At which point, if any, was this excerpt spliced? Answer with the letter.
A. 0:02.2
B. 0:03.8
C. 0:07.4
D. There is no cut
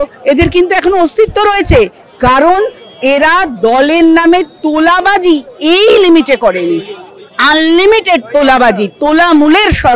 D